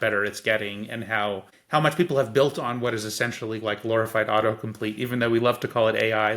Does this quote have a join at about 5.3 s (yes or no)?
no